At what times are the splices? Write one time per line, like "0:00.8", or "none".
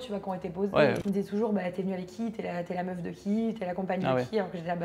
0:01.0